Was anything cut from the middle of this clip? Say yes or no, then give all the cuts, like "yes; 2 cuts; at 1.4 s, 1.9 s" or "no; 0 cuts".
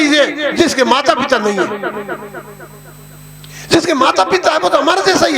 no; 0 cuts